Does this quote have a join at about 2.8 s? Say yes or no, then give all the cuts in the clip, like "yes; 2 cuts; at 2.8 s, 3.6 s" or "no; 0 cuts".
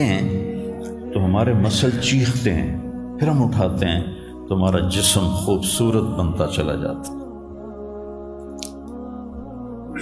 no; 1 cut; at 1.5 s